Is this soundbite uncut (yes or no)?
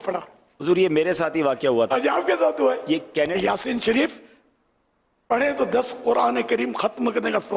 no